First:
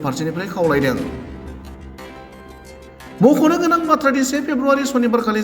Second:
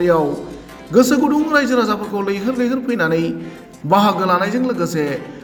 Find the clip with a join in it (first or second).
first